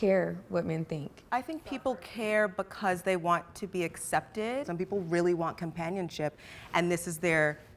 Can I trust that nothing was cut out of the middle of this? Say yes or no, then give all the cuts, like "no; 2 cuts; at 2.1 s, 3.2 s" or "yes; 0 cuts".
no; 1 cut; at 1.2 s